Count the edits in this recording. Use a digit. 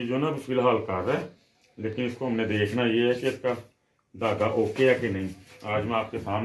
0